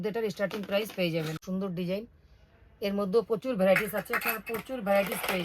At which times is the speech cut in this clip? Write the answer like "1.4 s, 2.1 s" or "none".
1.4 s